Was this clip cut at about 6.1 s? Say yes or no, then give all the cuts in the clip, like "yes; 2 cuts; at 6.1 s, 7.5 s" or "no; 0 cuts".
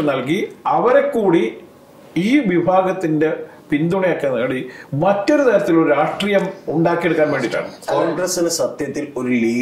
no; 1 cut; at 7.7 s